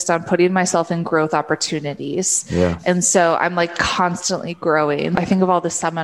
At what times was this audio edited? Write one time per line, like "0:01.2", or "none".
0:05.1

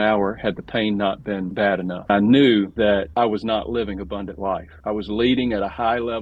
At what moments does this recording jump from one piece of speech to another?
0:01.7

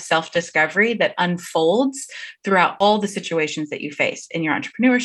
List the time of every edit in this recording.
0:02.8

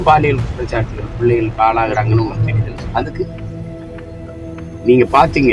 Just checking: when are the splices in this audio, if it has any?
none

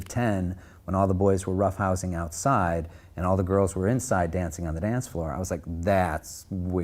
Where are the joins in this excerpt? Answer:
none

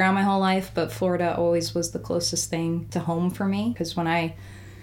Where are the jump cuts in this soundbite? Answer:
0:02.9
0:03.7

